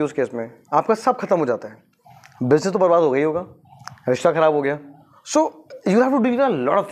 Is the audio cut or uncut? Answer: uncut